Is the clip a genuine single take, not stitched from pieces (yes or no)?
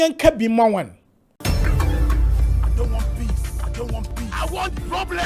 no